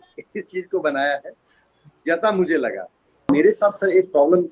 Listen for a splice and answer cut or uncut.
cut